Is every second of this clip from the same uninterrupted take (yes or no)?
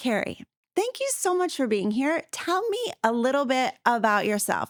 yes